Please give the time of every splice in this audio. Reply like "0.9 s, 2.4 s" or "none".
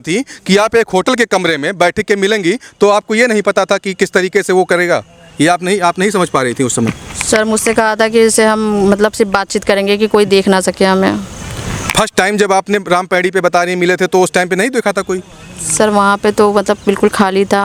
none